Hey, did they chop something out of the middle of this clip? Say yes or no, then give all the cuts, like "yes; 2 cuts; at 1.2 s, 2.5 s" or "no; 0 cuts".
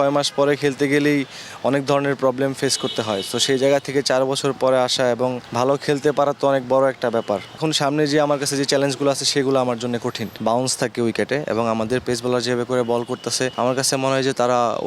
yes; 4 cuts; at 5.4 s, 7.6 s, 10.3 s, 13.5 s